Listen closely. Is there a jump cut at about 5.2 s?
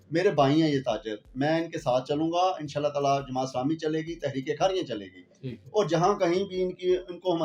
no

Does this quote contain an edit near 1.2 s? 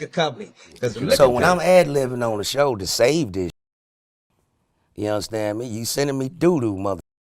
yes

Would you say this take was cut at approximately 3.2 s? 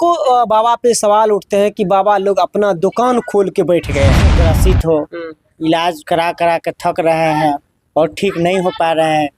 no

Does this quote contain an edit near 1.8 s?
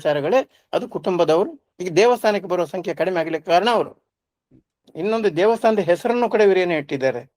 no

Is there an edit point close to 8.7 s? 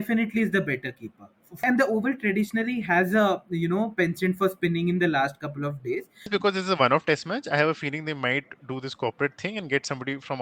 no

